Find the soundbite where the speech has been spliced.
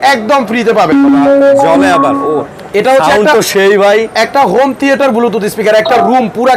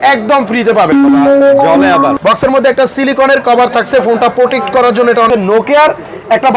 second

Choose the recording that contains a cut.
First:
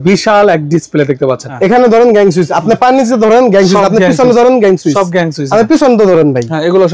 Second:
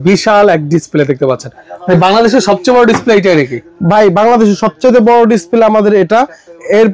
first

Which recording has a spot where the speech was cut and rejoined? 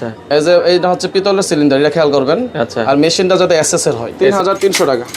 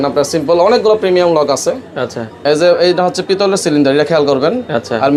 first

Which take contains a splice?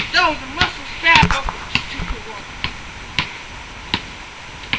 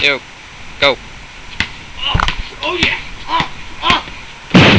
first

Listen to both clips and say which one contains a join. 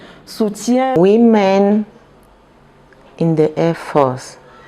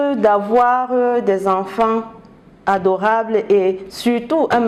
first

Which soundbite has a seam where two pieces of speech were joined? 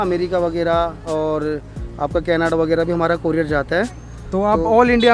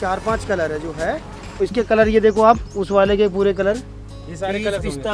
second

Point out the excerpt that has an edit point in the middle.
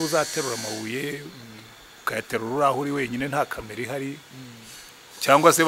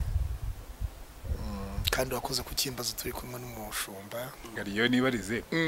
second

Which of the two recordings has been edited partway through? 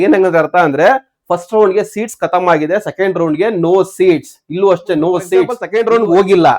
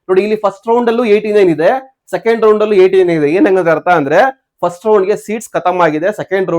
first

